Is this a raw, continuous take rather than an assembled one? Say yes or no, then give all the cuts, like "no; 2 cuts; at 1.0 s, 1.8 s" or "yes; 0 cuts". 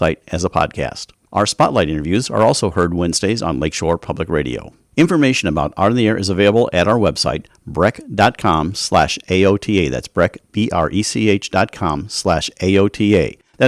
no; 1 cut; at 4.8 s